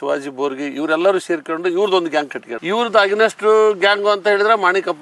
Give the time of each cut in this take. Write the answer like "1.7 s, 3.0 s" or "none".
2.4 s

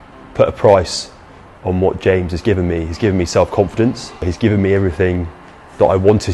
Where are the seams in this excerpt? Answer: 4.2 s

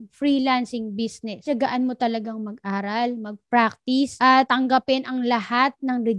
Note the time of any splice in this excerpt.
1.4 s

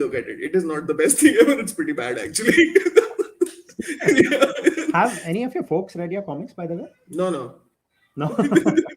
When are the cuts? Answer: 4.9 s, 7.0 s

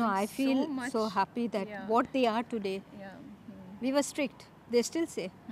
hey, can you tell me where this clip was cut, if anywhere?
none

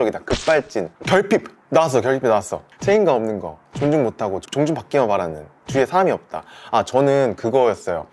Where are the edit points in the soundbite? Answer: none

